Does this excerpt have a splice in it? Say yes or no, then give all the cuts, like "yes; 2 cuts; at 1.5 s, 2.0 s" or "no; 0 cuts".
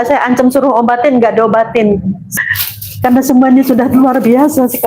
yes; 1 cut; at 2.3 s